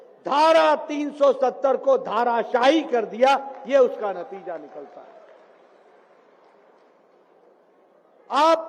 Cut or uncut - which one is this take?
uncut